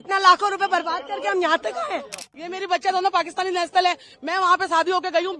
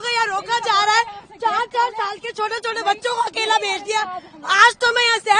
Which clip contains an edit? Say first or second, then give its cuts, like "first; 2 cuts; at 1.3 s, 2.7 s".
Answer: first; 1 cut; at 2.3 s